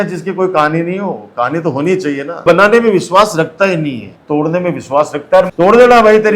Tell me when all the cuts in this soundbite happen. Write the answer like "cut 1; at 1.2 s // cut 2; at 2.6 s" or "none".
cut 1; at 2.4 s // cut 2; at 4.1 s // cut 3; at 5.5 s